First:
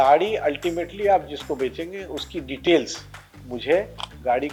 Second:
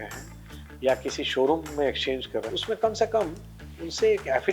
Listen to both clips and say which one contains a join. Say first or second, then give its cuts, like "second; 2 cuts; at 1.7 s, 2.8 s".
second; 1 cut; at 2.5 s